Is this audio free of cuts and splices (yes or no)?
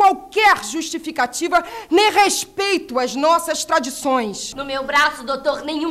no